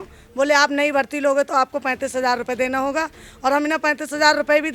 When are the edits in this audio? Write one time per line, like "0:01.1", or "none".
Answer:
none